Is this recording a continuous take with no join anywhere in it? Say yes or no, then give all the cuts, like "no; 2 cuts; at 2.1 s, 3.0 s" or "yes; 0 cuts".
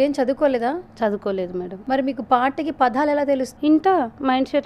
no; 2 cuts; at 1.8 s, 3.5 s